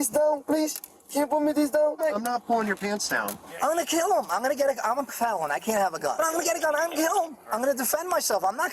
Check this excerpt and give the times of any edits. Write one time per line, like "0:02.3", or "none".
0:02.0
0:03.4
0:06.1
0:07.4